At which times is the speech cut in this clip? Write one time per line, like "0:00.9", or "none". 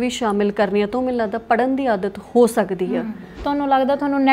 0:03.3